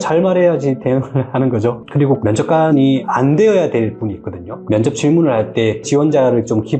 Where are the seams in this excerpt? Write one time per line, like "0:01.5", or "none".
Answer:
0:02.0
0:04.5